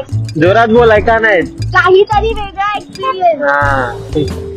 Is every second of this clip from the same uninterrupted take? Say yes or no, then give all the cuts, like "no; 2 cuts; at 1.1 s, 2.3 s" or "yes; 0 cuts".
yes; 0 cuts